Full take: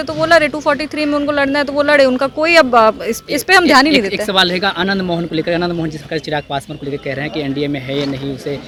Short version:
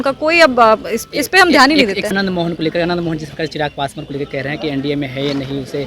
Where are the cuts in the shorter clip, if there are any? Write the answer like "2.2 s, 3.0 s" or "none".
2.1 s